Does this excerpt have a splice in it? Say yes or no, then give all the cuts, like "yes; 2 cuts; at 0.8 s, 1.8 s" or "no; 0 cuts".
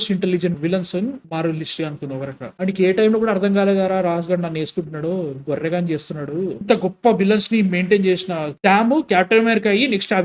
yes; 2 cuts; at 2.5 s, 6.6 s